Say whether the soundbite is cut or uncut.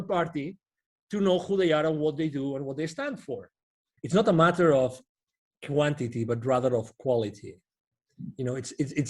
cut